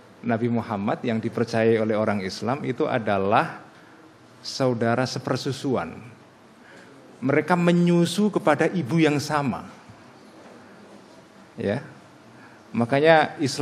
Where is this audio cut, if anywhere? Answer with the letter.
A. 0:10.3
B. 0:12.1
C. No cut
A